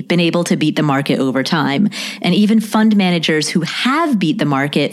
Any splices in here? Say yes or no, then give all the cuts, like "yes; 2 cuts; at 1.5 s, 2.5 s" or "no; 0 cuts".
no; 0 cuts